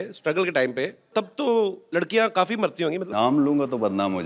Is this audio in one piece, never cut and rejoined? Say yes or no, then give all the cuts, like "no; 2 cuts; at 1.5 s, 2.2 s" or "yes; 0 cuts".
no; 3 cuts; at 1.1 s, 1.8 s, 3.1 s